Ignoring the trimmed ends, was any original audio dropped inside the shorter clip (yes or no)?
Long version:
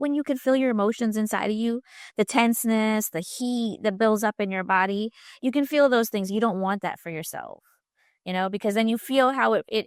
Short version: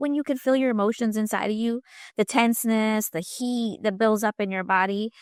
no